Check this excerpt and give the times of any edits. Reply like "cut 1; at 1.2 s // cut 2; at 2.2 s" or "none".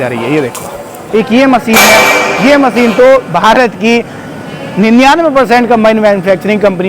cut 1; at 1.0 s